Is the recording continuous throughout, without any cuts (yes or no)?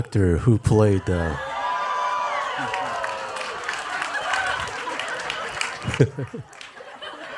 yes